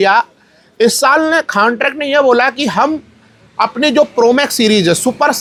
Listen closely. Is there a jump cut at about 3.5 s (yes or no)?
no